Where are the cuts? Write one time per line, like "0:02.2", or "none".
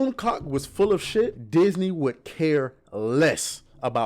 0:01.4